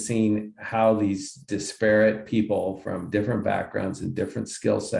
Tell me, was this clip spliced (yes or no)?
no